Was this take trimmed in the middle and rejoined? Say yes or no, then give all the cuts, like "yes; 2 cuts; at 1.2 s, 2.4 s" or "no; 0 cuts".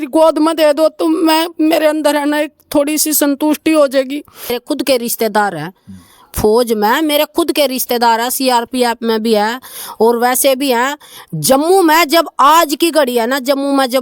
yes; 1 cut; at 4.5 s